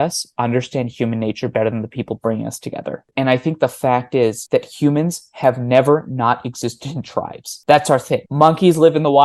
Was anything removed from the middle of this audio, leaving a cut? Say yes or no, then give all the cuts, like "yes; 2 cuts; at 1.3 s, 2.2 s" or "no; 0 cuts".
no; 0 cuts